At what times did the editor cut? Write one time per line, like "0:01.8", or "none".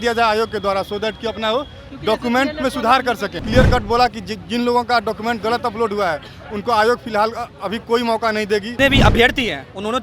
0:03.3
0:08.7